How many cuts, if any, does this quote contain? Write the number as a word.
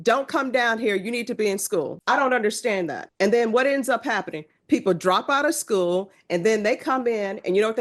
two